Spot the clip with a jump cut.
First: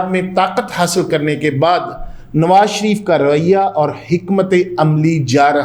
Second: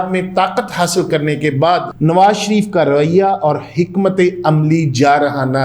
second; 1 cut; at 1.9 s

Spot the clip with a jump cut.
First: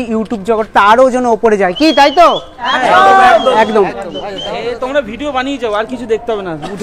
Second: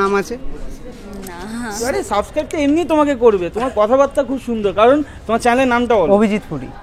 second; 1 cut; at 1.9 s

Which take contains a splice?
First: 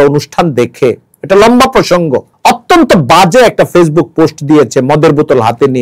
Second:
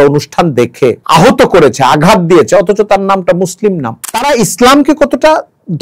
second; 2 cuts; at 1.0 s, 4.0 s

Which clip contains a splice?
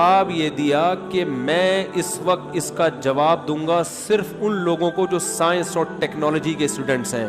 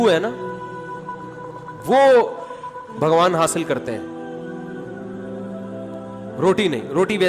second; 2 cuts; at 4.1 s, 6.4 s

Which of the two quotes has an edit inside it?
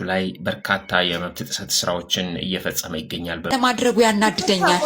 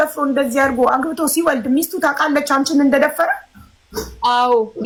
first; 1 cut; at 3.3 s

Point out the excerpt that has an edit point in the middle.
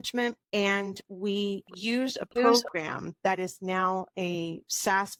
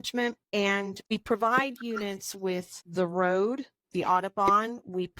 second; 2 cuts; at 1.0 s, 2.9 s

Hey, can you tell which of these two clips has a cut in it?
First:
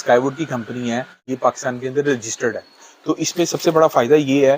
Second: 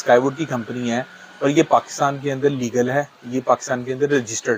first; 1 cut; at 1.2 s

